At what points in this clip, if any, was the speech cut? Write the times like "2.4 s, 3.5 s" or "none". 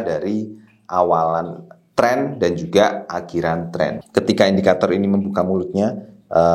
4.0 s

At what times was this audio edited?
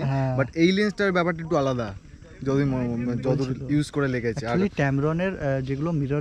none

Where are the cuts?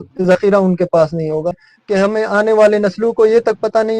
1.7 s

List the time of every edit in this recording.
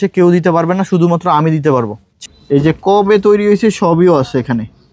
2.0 s

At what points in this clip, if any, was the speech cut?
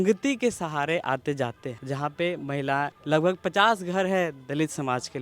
1.7 s, 3.0 s

